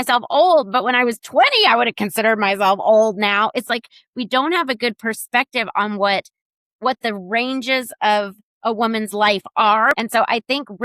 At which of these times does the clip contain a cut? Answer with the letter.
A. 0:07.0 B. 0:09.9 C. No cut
B